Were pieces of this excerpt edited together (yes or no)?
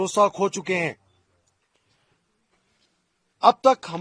no